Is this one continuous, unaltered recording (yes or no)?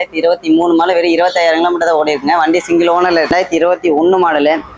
no